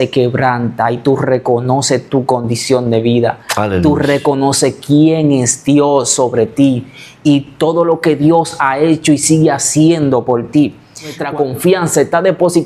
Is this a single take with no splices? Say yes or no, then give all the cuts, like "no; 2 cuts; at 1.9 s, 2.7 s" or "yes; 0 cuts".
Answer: no; 1 cut; at 11.2 s